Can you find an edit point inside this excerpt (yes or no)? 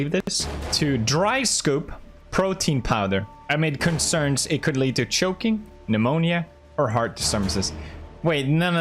yes